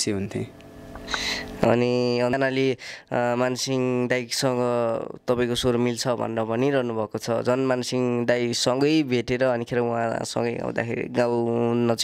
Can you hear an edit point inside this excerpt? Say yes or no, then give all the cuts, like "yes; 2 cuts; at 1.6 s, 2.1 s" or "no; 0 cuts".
no; 0 cuts